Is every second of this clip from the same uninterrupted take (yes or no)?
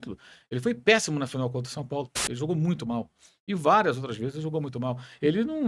no